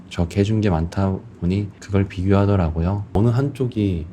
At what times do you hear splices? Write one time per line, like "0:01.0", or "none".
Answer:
0:03.1